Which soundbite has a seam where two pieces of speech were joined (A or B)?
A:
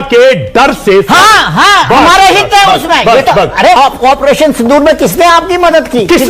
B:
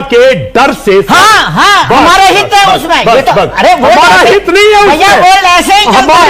A